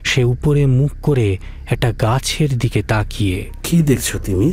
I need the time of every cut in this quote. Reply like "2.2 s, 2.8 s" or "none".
3.5 s